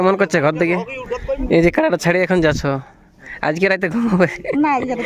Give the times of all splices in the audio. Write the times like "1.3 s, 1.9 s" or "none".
none